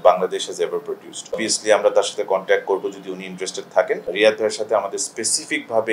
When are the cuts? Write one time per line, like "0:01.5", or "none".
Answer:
0:01.4
0:04.1